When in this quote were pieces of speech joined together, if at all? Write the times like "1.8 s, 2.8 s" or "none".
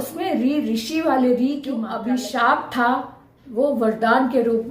1.9 s